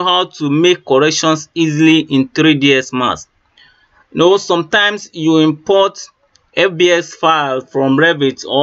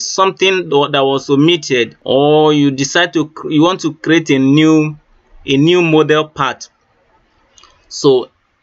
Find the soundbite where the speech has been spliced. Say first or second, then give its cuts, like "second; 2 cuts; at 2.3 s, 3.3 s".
second; 1 cut; at 1.9 s